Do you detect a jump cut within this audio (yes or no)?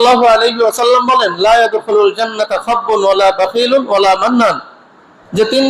no